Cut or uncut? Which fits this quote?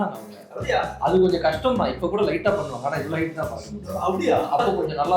uncut